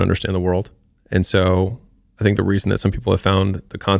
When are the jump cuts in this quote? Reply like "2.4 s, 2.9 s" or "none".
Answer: none